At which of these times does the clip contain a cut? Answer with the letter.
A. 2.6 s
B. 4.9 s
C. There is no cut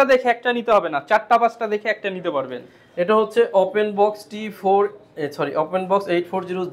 C